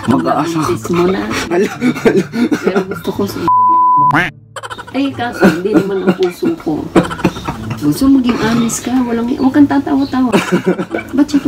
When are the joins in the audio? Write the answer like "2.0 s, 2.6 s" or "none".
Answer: none